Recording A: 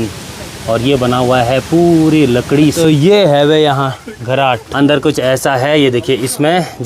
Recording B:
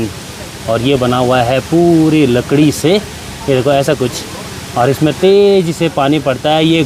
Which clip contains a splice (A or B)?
A